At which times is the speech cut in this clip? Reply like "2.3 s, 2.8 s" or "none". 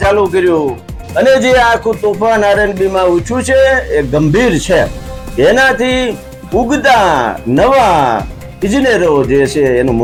none